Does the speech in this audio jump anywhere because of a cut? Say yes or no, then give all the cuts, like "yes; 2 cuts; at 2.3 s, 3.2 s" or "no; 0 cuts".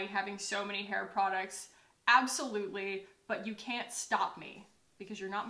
no; 0 cuts